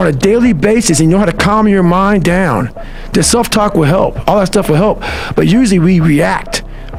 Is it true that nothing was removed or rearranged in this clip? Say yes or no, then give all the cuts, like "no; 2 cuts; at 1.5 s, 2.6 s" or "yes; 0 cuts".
yes; 0 cuts